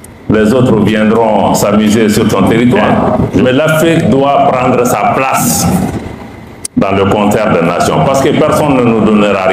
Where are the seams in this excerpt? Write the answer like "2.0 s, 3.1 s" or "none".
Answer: 3.4 s

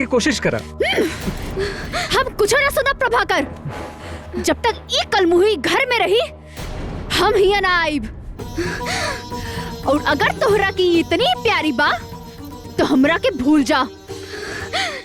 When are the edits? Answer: none

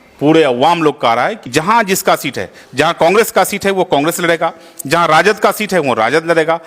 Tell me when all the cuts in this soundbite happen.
1.5 s

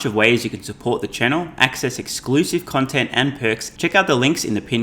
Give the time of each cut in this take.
3.7 s

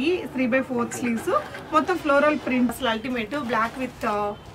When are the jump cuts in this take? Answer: 2.7 s

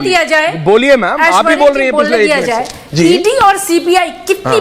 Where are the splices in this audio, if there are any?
none

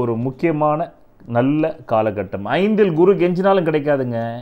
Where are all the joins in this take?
none

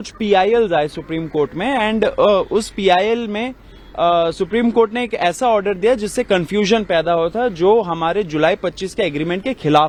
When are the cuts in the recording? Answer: none

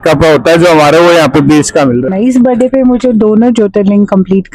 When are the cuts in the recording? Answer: 2.1 s

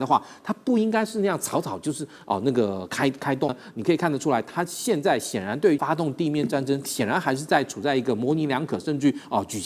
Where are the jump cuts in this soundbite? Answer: 3.6 s, 5.8 s

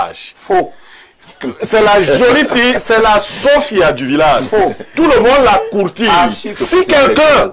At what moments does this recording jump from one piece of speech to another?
6.5 s

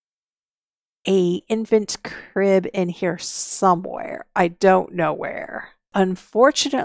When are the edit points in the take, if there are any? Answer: 5.9 s

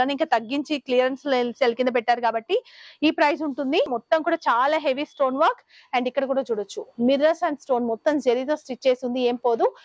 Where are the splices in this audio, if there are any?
4.0 s

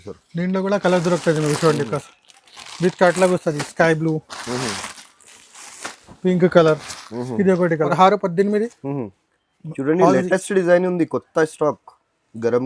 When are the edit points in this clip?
7.9 s

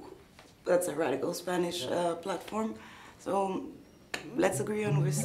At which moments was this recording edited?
none

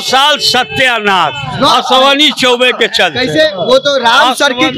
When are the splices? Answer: none

